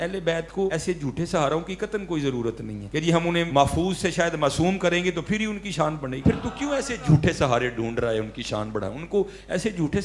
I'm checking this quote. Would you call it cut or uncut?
cut